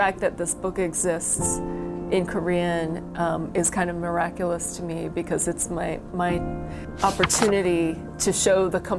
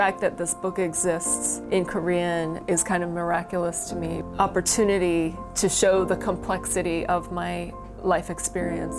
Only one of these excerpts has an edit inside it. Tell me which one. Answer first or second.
second